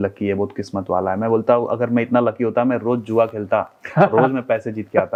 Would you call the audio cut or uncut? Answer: uncut